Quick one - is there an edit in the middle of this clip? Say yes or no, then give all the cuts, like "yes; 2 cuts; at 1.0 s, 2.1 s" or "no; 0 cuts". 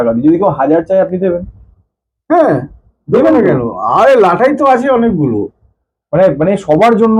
no; 0 cuts